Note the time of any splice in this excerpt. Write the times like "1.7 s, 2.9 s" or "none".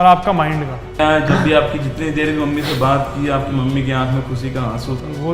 1.0 s